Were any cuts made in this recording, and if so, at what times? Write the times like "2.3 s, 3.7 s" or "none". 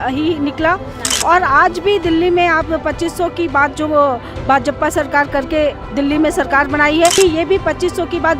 7.2 s